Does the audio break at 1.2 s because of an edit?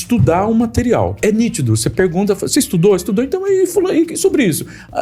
yes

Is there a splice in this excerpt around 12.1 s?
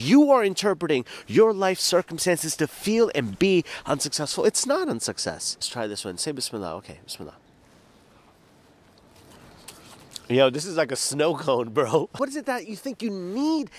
yes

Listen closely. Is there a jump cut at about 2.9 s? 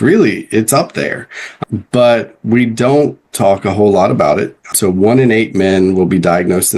no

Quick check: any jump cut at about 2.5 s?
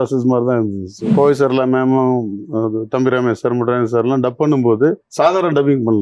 no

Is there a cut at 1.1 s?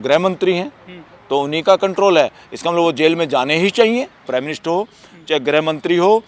no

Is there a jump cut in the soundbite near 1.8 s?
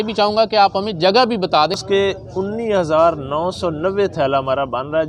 yes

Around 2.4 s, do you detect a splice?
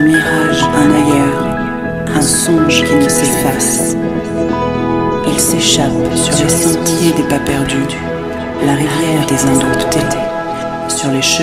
no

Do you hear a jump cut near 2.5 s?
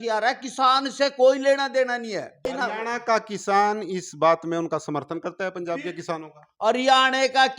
yes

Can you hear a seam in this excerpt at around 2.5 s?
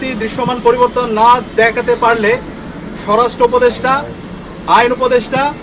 no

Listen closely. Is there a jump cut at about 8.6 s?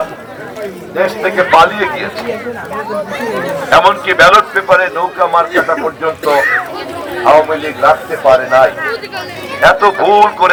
no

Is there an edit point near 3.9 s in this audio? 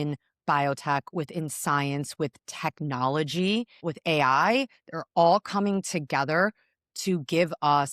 yes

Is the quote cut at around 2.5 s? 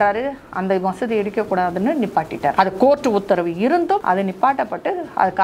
yes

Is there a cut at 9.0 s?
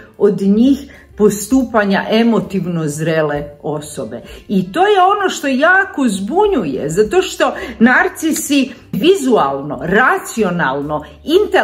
yes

